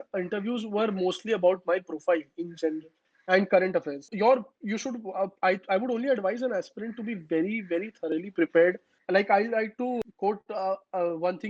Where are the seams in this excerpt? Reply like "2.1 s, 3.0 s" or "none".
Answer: 4.1 s, 8.9 s, 10.0 s